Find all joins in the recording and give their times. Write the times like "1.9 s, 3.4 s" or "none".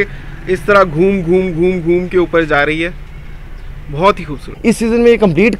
4.5 s